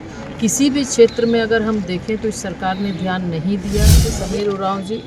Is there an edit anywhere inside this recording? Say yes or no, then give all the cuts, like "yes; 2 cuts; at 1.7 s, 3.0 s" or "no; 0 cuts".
yes; 1 cut; at 4.1 s